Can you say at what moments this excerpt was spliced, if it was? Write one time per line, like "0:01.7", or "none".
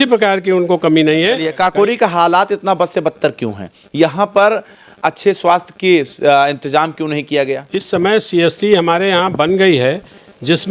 0:01.4
0:07.7